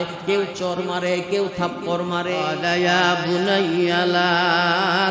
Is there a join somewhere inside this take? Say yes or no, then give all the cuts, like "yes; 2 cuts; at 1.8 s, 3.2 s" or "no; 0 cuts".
yes; 1 cut; at 2.5 s